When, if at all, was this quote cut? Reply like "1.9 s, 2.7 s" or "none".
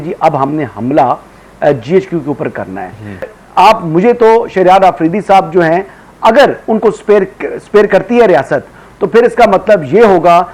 3.3 s